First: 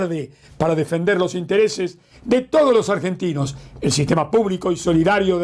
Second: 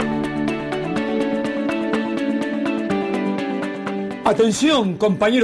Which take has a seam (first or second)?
second